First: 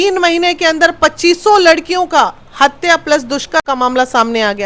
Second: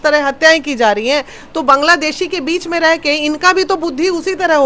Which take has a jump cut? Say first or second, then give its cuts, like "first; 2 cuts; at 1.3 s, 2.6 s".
first; 1 cut; at 3.6 s